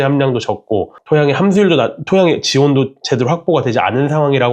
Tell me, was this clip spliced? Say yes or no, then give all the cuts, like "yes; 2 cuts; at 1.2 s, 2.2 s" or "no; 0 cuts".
yes; 1 cut; at 0.9 s